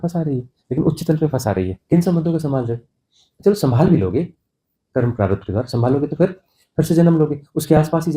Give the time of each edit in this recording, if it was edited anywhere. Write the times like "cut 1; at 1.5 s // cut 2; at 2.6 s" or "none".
cut 1; at 1.8 s